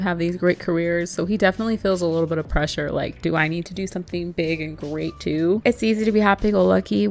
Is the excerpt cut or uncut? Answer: cut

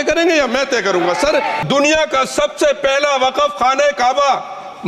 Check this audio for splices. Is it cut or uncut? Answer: cut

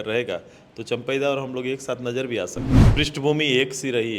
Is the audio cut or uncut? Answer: cut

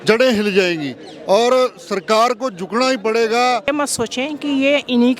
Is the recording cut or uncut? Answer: cut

